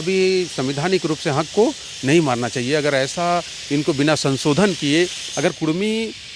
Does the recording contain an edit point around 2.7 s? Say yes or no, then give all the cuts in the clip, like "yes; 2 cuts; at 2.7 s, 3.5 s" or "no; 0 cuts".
no; 0 cuts